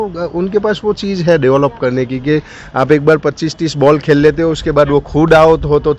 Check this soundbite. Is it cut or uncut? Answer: uncut